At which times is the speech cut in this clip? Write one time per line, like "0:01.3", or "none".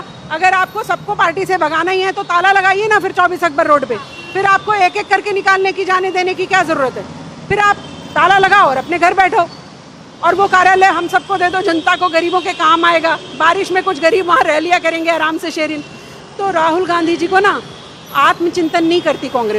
none